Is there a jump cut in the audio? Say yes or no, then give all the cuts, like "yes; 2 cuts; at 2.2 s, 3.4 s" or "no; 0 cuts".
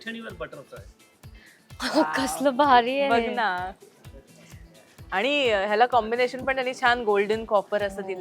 yes; 1 cut; at 1.2 s